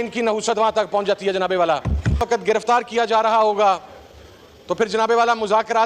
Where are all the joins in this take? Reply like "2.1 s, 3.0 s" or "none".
2.2 s